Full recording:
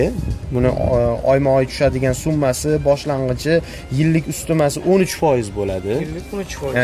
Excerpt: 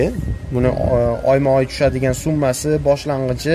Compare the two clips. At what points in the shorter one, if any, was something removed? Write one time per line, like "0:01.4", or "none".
none